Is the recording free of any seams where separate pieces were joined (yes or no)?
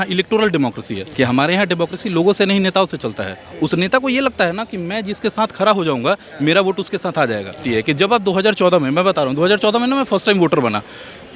no